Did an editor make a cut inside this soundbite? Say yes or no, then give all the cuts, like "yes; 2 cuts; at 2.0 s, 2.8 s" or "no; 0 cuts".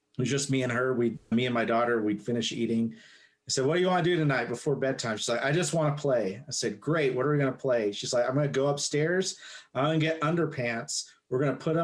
yes; 1 cut; at 1.3 s